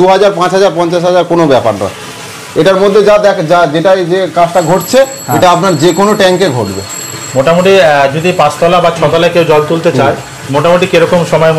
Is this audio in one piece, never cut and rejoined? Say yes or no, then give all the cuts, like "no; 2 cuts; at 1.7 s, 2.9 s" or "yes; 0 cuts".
yes; 0 cuts